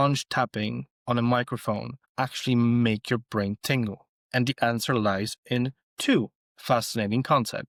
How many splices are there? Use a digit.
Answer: 0